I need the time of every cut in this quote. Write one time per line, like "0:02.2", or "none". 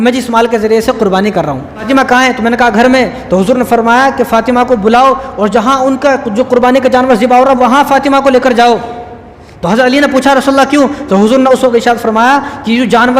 0:01.9